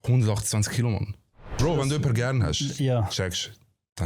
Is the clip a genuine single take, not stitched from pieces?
no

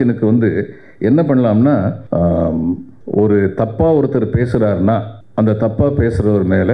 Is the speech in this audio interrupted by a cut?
yes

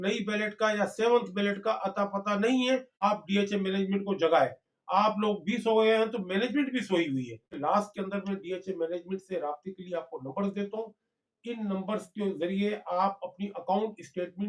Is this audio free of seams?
no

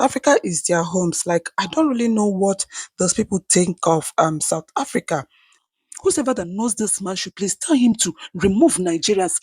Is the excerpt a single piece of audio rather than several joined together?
no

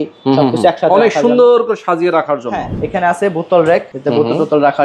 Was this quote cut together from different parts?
yes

